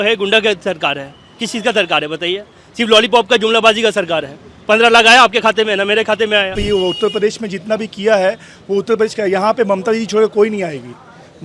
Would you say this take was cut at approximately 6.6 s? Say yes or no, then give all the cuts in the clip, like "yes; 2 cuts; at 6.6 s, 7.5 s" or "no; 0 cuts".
yes; 1 cut; at 6.6 s